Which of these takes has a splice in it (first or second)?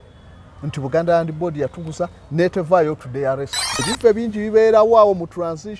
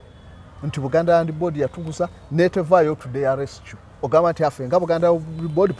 first